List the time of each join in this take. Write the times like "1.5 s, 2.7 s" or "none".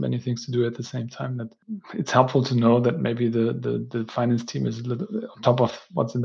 1.6 s